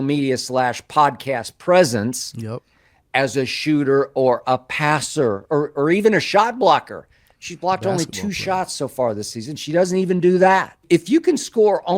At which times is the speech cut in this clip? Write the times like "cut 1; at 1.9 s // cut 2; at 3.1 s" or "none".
cut 1; at 10.8 s